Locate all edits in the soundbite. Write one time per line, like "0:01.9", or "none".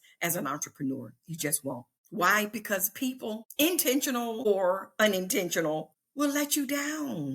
0:01.9
0:03.5
0:04.4
0:06.0